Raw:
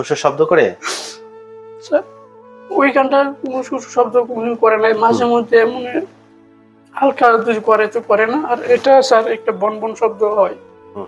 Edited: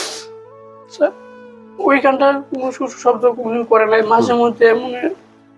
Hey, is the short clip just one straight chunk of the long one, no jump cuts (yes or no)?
yes